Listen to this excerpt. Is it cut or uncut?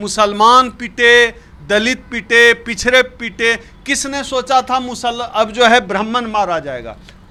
uncut